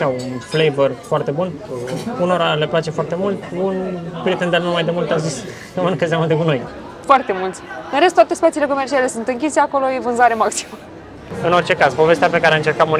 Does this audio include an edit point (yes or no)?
yes